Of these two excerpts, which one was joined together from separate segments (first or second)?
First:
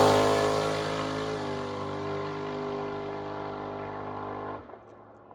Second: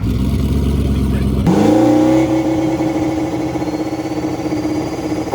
second